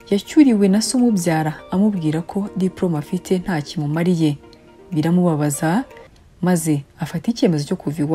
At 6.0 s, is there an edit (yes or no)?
yes